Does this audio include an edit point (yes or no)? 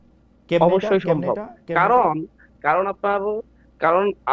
no